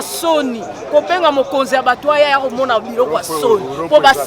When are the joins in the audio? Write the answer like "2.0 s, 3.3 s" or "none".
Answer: none